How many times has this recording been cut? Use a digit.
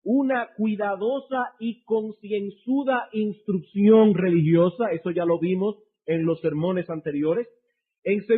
1